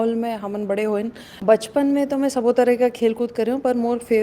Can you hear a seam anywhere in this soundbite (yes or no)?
yes